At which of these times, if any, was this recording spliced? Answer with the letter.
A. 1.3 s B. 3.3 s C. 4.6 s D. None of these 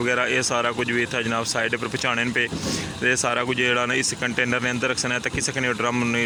D